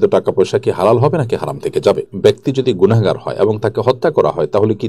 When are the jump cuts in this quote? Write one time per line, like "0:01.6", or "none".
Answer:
0:02.1